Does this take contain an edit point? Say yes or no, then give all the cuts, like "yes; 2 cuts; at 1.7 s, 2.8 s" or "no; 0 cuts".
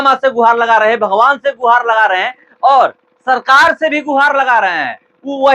no; 0 cuts